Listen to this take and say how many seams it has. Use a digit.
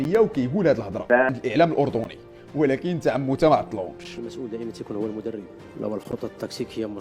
1